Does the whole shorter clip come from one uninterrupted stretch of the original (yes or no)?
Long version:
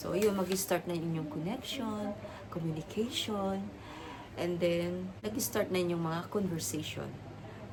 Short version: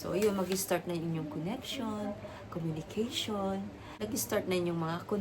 no